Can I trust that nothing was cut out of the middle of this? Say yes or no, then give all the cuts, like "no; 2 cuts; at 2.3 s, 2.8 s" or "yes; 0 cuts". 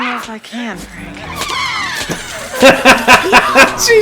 yes; 0 cuts